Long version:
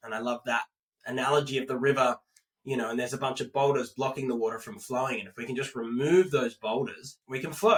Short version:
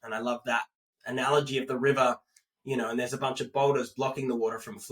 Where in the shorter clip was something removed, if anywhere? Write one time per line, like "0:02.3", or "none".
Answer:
none